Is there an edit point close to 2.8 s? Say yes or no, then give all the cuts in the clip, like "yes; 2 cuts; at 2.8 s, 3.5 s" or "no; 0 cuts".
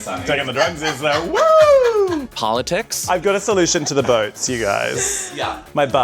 yes; 1 cut; at 2.8 s